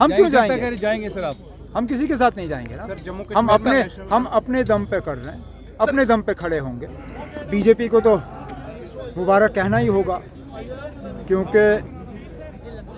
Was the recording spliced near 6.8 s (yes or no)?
yes